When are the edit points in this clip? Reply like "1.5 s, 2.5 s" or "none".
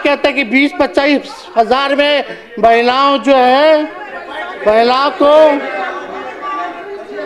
none